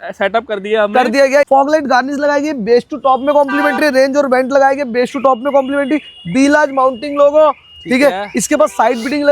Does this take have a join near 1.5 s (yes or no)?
yes